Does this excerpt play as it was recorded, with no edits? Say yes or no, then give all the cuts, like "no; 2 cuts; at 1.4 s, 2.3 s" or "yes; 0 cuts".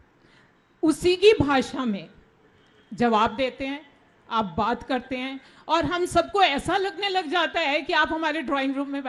yes; 0 cuts